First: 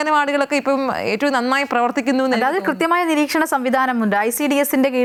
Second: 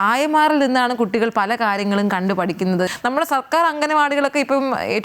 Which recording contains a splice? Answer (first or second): second